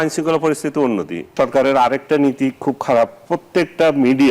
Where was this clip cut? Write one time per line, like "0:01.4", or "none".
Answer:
0:01.3